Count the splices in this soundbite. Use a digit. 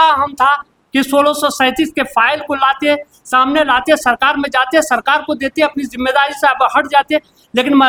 0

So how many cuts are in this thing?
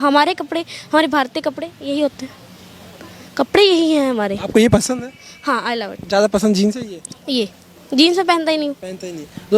0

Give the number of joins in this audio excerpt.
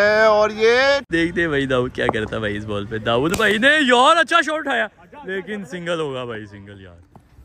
1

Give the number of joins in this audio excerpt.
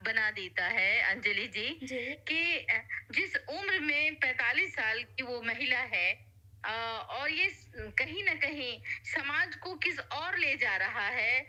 0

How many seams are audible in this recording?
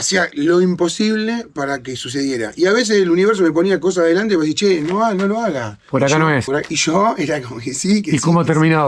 0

